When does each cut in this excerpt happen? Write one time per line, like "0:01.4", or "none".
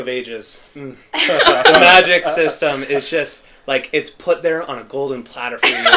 none